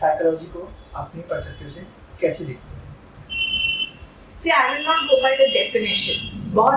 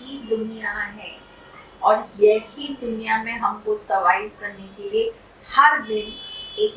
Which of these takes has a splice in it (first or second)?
first